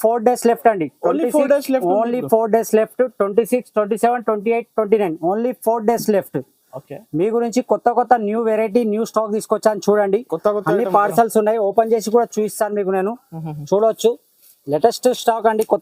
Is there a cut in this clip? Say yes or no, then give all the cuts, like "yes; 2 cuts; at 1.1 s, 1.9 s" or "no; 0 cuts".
no; 0 cuts